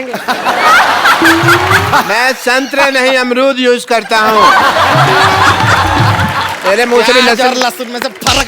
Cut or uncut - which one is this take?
cut